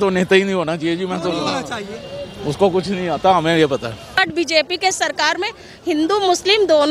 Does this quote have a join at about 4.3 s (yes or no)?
yes